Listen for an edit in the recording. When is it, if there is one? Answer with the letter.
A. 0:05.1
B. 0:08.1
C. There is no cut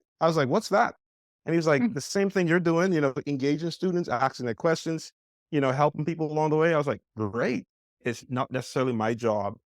B